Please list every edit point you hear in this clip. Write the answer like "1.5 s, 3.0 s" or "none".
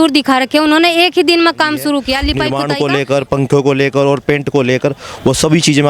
2.5 s